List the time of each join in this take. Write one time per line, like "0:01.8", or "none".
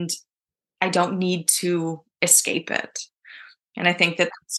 none